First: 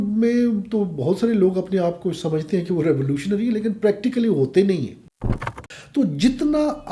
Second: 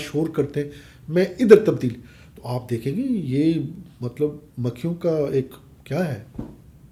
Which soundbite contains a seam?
first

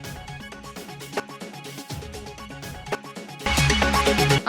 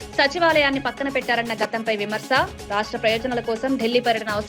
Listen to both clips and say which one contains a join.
first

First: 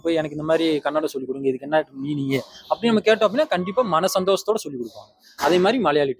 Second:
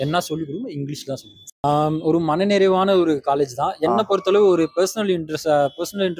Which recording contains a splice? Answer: second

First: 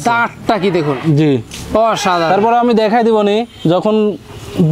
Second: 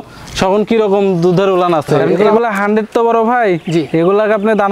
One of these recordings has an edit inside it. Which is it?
second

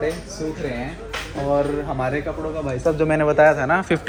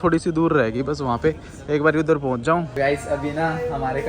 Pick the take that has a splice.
second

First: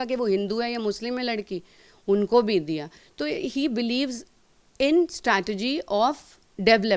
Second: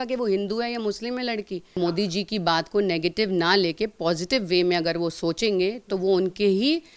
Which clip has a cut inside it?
second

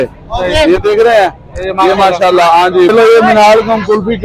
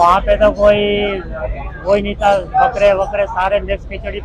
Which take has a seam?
first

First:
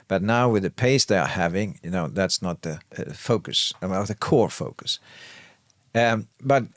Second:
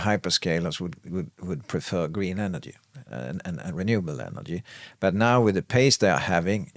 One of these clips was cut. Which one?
first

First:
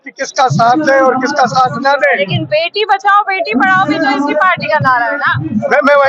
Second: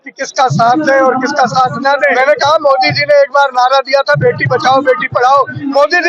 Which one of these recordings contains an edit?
second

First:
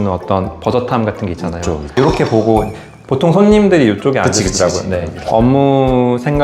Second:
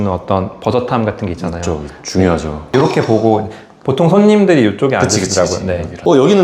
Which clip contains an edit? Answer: first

